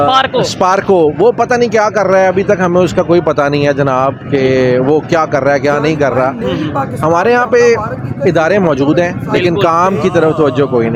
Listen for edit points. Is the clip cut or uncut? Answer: uncut